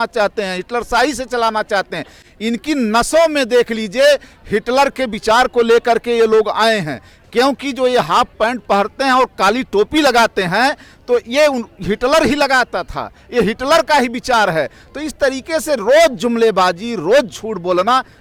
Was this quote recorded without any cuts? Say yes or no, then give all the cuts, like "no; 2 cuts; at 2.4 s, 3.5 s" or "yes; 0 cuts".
yes; 0 cuts